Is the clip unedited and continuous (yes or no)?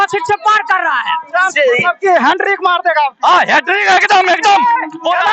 no